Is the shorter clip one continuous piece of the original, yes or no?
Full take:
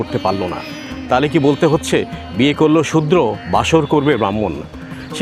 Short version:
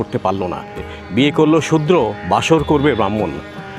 no